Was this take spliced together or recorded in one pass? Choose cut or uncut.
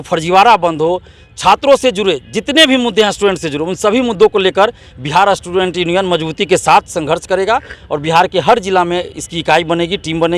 uncut